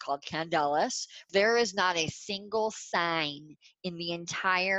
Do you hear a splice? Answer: yes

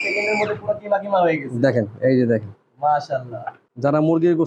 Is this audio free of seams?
yes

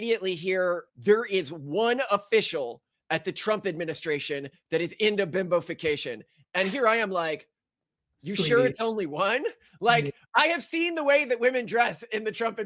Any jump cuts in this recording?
no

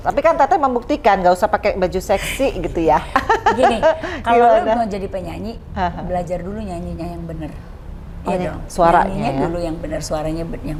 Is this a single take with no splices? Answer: yes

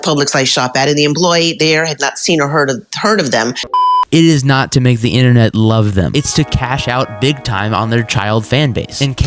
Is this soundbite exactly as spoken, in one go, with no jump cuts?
no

